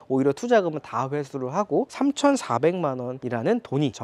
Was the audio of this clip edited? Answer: no; 0 cuts

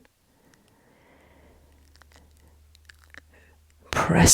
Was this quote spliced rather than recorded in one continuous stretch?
yes; 1 cut; at 1.0 s

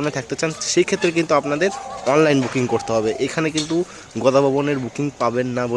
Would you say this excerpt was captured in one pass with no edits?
yes; 0 cuts

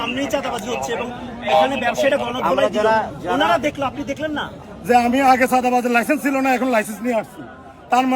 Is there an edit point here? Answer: yes; 1 cut; at 4.7 s

